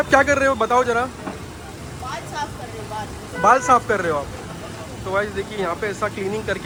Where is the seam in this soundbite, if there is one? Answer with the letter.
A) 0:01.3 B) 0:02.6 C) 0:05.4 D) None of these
D